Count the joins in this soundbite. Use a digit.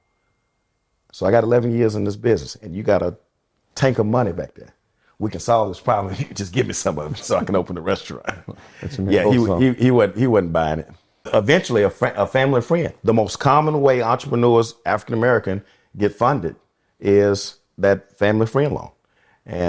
1